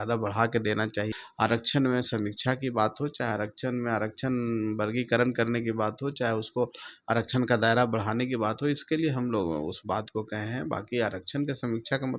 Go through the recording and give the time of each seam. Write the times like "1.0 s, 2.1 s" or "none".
1.2 s